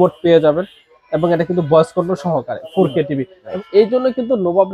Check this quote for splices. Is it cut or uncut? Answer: cut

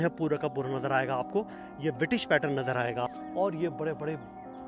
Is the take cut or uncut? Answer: cut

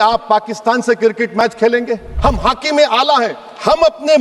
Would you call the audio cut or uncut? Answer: cut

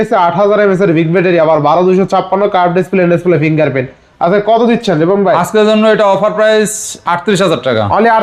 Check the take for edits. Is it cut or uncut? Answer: uncut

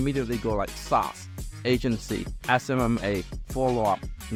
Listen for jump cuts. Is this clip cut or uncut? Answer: uncut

